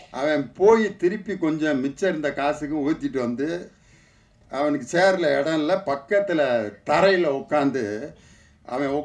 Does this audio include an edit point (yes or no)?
no